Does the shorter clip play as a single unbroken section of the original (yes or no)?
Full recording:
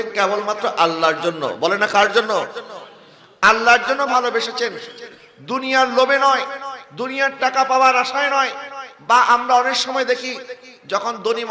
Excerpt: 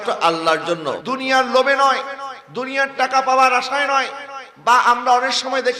no